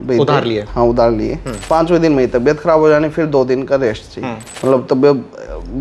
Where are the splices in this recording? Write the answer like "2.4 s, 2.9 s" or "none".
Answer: 1.5 s